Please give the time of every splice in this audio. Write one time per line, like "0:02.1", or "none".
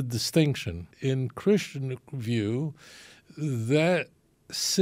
0:00.9